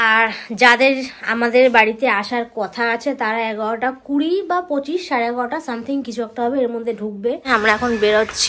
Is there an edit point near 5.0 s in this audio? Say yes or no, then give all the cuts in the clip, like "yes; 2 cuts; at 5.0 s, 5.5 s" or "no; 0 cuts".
no; 1 cut; at 7.4 s